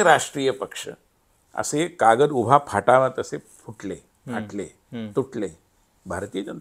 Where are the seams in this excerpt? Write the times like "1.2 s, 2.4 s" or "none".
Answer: none